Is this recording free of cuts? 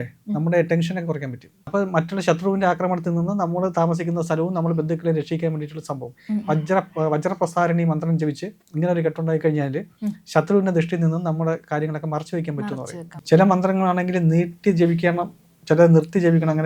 no; 2 cuts; at 1.5 s, 13.1 s

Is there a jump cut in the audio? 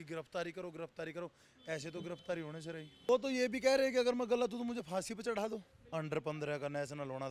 yes; 2 cuts; at 3.1 s, 5.7 s

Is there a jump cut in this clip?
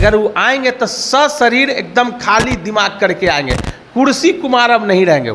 no; 0 cuts

